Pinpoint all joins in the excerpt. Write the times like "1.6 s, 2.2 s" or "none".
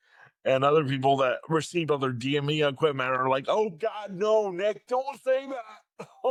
none